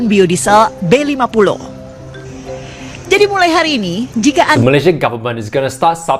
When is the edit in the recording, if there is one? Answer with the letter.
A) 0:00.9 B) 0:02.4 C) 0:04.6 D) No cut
C